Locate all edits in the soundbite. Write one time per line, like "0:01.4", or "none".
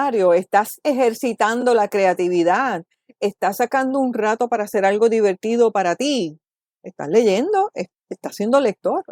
none